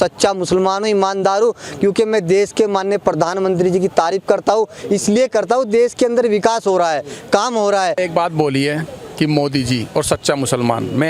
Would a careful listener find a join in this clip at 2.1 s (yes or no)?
no